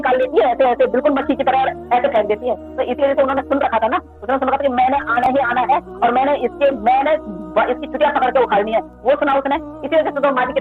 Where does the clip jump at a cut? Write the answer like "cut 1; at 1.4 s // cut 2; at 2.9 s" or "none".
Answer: none

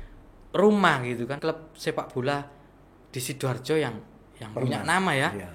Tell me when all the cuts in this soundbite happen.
cut 1; at 1.4 s

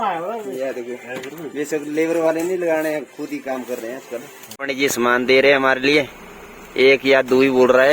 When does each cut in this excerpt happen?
cut 1; at 4.4 s

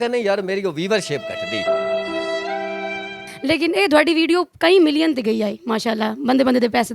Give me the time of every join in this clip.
cut 1; at 3.0 s

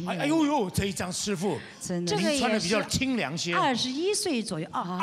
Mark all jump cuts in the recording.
none

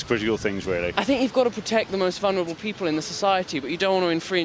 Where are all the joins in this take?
cut 1; at 0.9 s

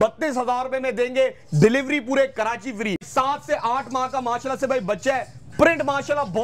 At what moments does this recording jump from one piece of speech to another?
cut 1; at 3.0 s

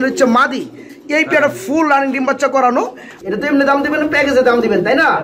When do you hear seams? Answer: cut 1; at 3.1 s

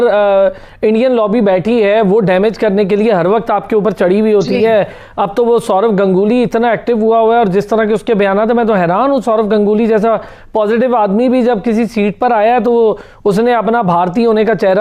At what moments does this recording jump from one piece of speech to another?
none

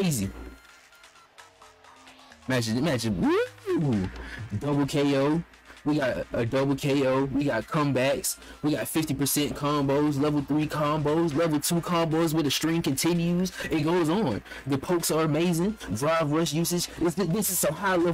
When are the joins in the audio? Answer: none

